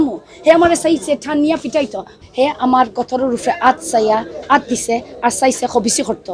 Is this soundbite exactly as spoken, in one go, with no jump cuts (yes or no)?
no